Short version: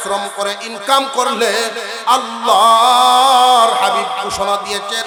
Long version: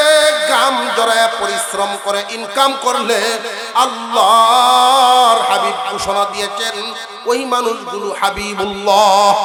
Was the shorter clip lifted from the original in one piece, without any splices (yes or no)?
yes